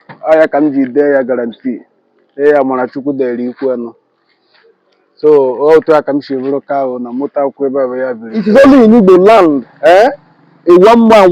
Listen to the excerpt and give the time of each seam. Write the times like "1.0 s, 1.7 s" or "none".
8.4 s